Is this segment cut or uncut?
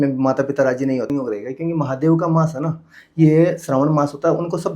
cut